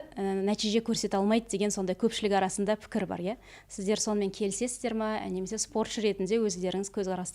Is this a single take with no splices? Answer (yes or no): yes